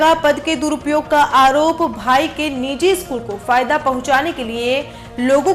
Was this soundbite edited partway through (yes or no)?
no